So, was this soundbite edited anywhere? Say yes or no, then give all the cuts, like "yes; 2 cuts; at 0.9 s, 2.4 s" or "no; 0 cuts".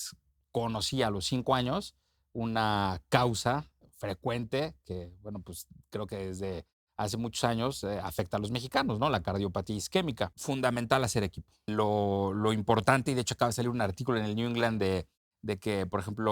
yes; 3 cuts; at 3.8 s, 10.4 s, 11.7 s